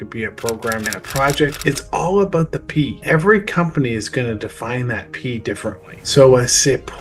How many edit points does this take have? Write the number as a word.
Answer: three